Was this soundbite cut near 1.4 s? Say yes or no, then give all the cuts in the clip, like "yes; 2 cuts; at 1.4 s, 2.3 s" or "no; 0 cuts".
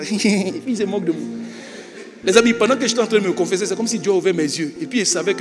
no; 0 cuts